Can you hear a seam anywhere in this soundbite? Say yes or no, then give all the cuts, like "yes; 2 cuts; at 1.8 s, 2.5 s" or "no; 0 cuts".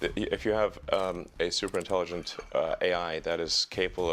no; 0 cuts